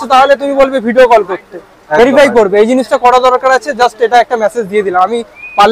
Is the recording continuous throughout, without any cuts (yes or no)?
yes